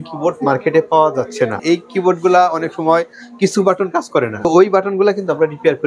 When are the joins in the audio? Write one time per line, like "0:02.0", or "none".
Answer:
0:01.6
0:04.3